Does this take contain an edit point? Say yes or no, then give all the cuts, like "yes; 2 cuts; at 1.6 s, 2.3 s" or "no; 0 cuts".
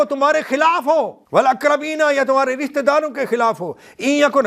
yes; 1 cut; at 1.2 s